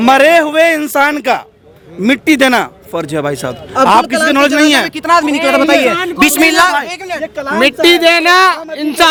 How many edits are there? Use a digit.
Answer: 0